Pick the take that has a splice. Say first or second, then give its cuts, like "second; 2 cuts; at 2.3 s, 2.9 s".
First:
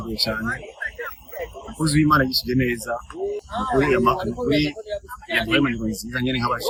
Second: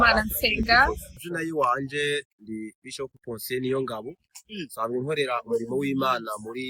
second; 1 cut; at 1.2 s